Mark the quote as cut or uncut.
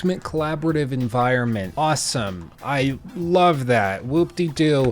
cut